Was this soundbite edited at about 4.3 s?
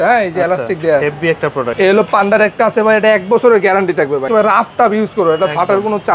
yes; 2 cuts; at 1.7 s, 4.3 s

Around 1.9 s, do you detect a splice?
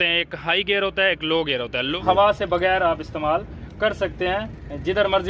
yes; 1 cut; at 1.9 s

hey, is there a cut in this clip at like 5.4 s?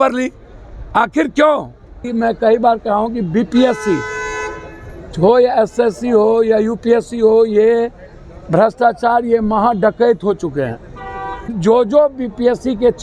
no; 2 cuts; at 2.1 s, 11.6 s

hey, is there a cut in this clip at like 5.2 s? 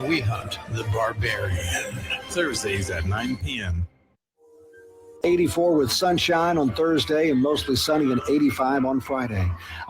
yes; 1 cut; at 5.2 s

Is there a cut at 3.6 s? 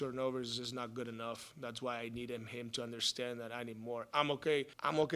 no; 1 cut; at 1.5 s

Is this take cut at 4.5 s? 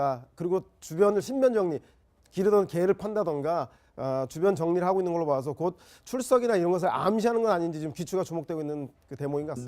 yes; 1 cut; at 4.5 s

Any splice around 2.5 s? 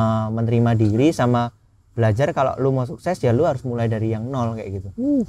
no; 0 cuts

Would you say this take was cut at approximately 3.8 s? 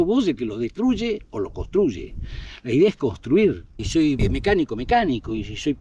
yes; 1 cut; at 3.8 s

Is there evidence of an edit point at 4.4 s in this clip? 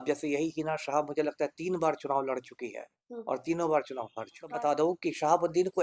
yes; 1 cut; at 4.4 s

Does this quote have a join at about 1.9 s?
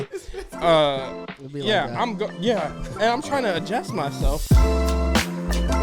no; 1 cut; at 4.3 s

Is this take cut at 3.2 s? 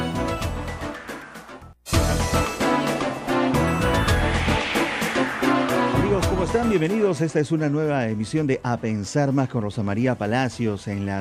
yes; 2 cuts; at 1.7 s, 3.2 s

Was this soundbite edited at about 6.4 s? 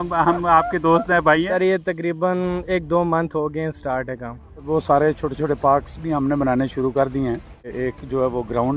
no; 3 cuts; at 2.0 s, 4.6 s, 7.7 s

